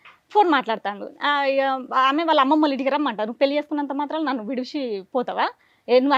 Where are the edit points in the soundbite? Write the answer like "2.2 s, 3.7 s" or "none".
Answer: none